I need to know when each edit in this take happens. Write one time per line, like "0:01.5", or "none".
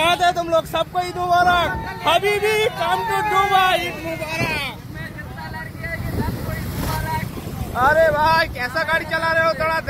none